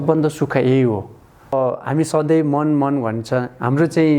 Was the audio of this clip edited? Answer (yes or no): yes